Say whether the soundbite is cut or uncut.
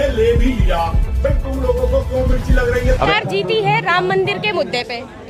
cut